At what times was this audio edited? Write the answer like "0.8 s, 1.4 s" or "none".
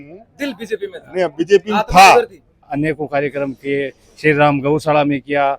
2.7 s